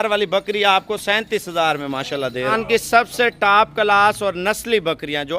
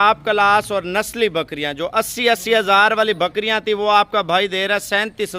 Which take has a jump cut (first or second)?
first